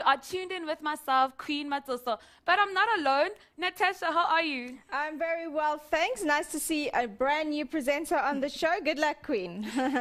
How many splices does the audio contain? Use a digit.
0